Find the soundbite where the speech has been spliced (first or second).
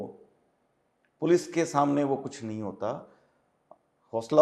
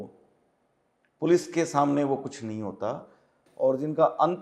second